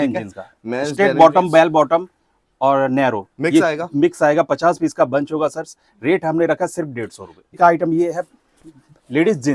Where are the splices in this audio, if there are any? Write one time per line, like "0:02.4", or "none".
0:07.6